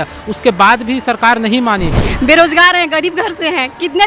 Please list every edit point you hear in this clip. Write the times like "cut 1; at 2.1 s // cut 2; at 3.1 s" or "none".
cut 1; at 2.1 s